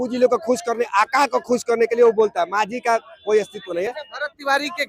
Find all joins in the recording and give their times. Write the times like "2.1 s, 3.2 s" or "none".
none